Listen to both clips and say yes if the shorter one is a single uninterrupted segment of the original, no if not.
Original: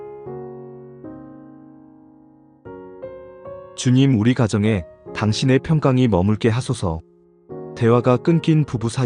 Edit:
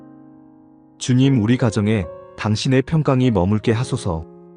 no